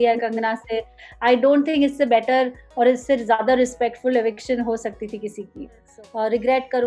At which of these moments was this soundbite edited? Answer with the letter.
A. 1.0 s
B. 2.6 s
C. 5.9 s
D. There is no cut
C